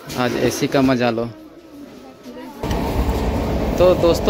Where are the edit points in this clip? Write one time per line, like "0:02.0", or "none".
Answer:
0:02.6